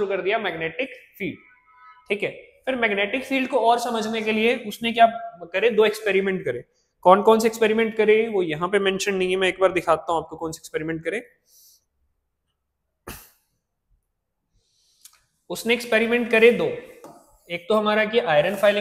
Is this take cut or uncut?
uncut